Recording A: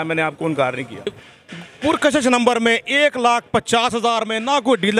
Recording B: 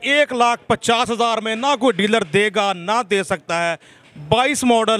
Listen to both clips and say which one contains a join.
A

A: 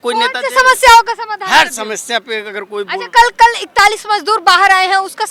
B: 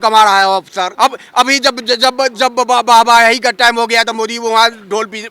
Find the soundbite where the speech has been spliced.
B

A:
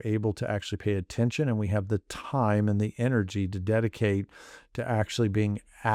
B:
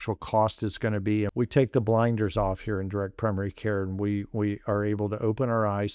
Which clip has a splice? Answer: B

